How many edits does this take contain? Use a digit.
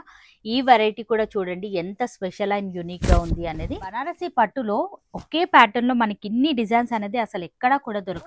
1